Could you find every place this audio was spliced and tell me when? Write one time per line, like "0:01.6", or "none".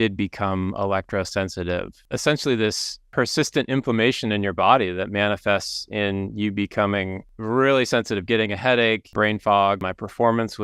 0:02.0
0:02.9
0:07.3
0:09.1
0:09.8

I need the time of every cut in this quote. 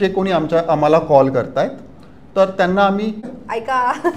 0:03.3

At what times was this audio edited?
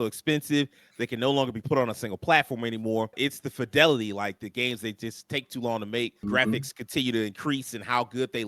0:03.2
0:06.2

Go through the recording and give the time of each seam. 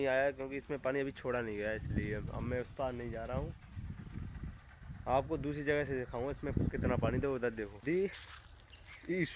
0:07.8

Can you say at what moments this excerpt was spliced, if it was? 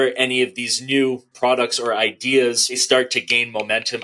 0:01.3
0:02.8

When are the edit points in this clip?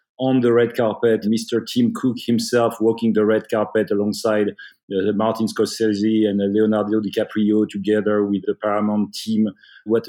0:01.2

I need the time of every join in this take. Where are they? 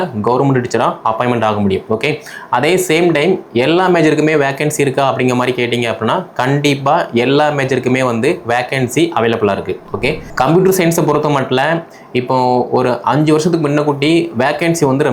0:10.2

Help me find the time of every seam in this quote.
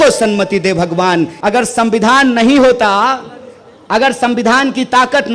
0:01.3

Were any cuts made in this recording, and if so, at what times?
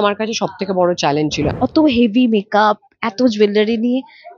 0:01.5

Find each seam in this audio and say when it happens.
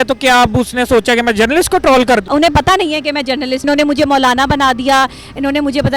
0:02.2
0:03.6

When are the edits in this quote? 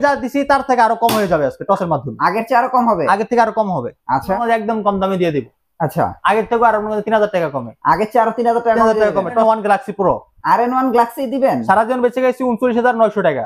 0:04.4
0:09.4

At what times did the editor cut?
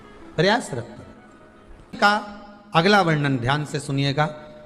0:02.0

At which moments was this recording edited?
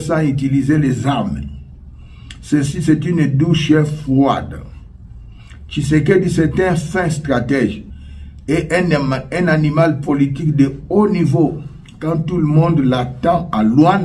0:07.9

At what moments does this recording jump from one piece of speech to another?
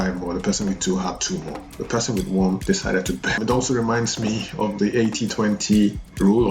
0:03.4

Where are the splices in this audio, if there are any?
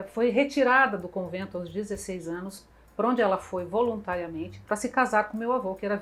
none

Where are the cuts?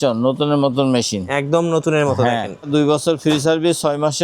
0:02.7

